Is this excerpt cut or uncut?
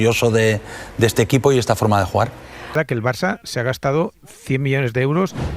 cut